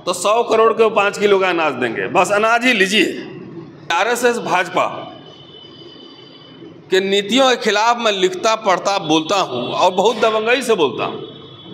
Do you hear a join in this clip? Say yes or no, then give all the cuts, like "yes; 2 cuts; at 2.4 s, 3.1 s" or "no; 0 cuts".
yes; 1 cut; at 3.9 s